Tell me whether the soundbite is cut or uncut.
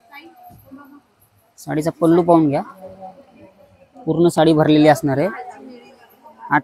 uncut